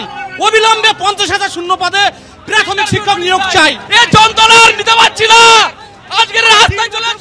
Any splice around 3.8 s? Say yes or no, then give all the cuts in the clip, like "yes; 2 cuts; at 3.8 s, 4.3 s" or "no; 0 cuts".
yes; 1 cut; at 3.8 s